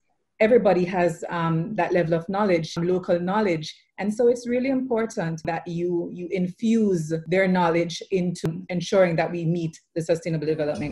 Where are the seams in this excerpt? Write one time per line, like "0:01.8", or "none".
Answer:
0:02.7
0:05.5
0:07.2
0:08.4